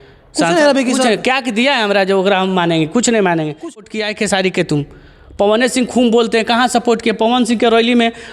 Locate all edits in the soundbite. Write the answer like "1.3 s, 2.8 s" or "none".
3.6 s